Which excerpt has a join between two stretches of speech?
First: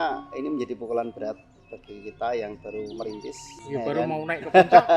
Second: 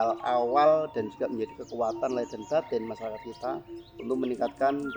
first; 1 cut; at 3.6 s

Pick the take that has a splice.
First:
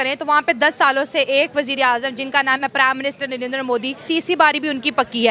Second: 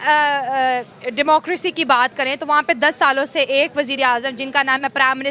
first; 1 cut; at 4.0 s

